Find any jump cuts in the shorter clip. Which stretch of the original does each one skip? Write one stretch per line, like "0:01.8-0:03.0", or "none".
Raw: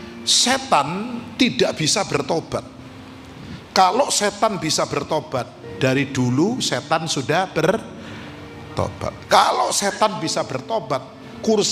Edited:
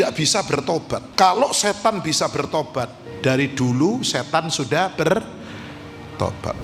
0:02.7-0:03.6